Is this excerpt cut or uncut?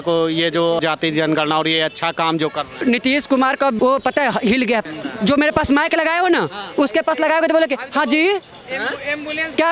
cut